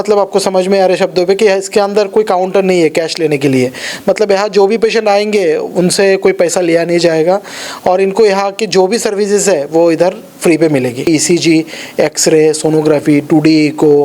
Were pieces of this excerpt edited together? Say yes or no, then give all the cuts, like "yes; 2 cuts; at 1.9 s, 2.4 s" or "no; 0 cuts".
yes; 1 cut; at 11.1 s